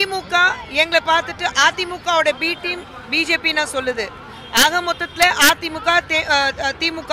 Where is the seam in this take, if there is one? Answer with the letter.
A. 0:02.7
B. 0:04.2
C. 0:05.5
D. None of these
D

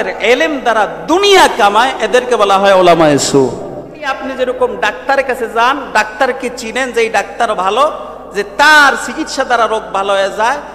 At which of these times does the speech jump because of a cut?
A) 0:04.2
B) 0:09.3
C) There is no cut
A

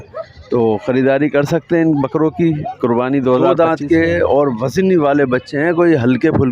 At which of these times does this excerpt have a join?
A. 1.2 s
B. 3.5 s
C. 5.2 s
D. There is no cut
B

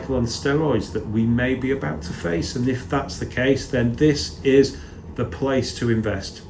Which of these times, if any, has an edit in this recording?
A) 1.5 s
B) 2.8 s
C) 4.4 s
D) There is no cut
D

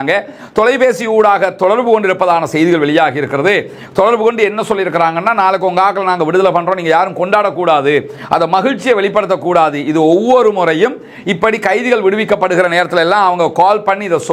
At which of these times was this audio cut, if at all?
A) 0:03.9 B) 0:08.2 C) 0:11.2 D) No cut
D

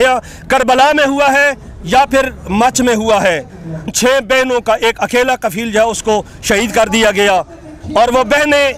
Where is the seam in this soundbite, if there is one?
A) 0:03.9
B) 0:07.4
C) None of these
A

